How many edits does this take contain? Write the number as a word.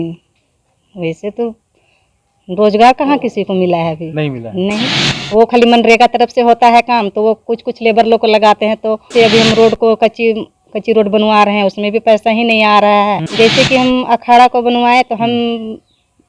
two